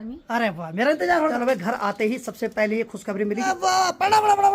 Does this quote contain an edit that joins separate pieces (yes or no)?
yes